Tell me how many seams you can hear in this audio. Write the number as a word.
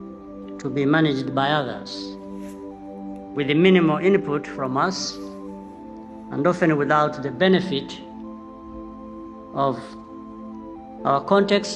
zero